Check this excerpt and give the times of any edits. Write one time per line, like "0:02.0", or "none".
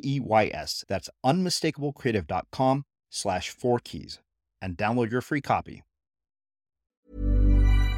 0:07.0